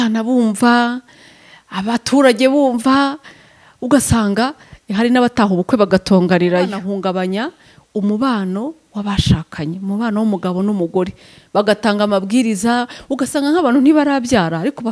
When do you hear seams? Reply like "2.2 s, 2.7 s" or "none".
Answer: 6.8 s